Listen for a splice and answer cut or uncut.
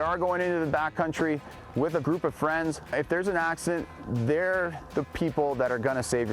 cut